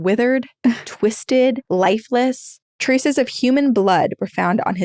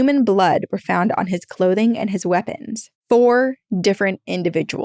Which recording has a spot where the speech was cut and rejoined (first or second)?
first